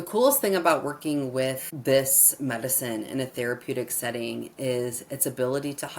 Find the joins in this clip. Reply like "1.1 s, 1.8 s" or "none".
1.7 s